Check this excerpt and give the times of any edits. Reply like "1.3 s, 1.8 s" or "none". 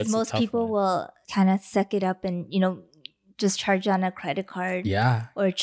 1.2 s